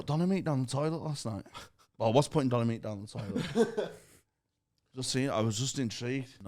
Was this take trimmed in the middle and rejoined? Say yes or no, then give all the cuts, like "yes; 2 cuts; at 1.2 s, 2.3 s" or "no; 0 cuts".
no; 0 cuts